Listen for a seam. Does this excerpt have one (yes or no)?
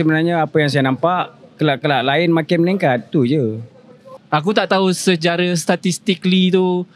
yes